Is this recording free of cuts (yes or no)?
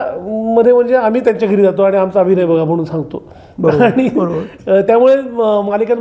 yes